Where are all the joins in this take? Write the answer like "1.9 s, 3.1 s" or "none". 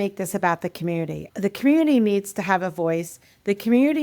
1.2 s